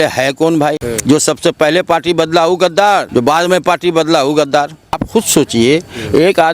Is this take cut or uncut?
cut